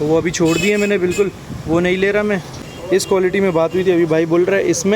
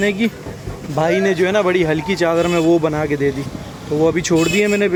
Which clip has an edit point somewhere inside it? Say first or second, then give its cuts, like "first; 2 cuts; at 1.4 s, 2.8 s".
first; 1 cut; at 2.6 s